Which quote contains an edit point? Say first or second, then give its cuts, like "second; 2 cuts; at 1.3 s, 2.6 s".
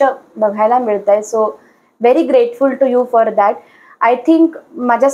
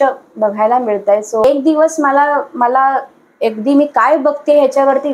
second; 1 cut; at 1.4 s